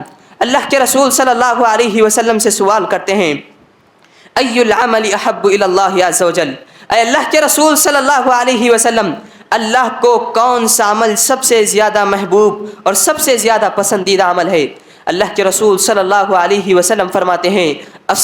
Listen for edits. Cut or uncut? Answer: uncut